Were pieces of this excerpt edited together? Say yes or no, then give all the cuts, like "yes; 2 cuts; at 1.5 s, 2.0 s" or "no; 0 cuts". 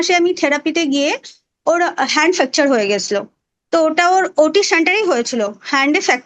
no; 0 cuts